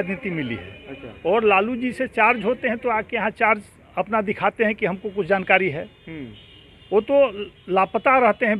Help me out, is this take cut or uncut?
uncut